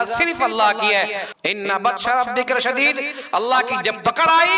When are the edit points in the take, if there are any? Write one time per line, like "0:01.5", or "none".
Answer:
0:01.2